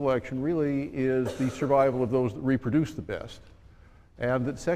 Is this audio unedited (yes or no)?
no